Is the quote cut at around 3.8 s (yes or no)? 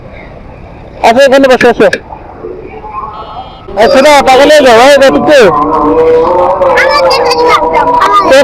yes